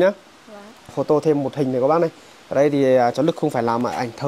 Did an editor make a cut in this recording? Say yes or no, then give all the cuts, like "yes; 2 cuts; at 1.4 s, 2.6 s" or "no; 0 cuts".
yes; 1 cut; at 1.0 s